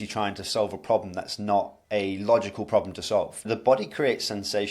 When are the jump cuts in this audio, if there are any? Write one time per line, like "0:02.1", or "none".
0:01.8
0:03.4